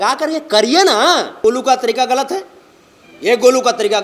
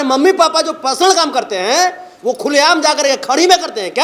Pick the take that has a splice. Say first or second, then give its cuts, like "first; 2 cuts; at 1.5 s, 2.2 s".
first; 1 cut; at 1.4 s